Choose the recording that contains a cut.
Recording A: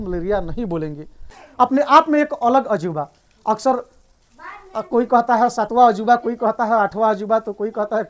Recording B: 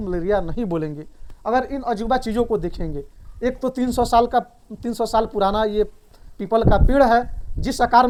A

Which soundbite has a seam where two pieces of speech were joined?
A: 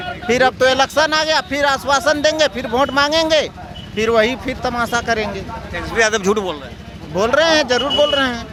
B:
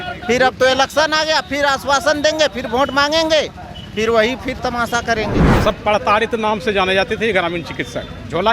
B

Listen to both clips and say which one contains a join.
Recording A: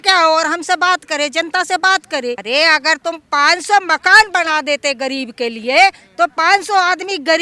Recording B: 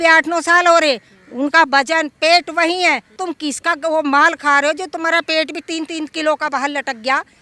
A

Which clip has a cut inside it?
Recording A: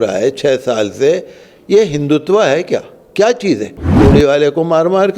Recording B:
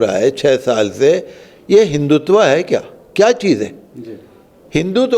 A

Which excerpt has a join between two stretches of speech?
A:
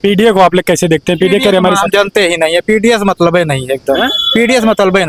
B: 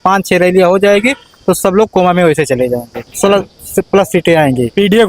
B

